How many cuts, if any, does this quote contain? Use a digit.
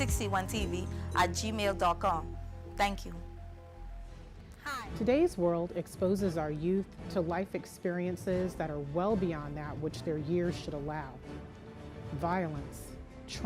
1